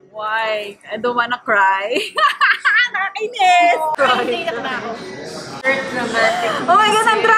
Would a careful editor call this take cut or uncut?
cut